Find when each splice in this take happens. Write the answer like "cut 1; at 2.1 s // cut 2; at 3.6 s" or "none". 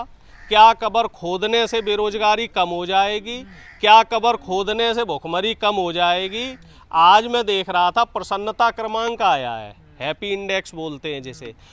none